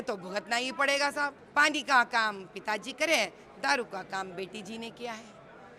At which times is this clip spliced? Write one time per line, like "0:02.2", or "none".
0:01.4